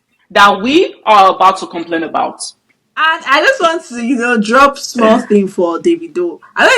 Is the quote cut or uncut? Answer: cut